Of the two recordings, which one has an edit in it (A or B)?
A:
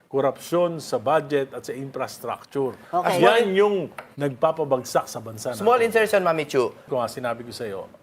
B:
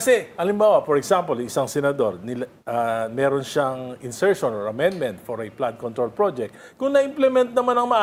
A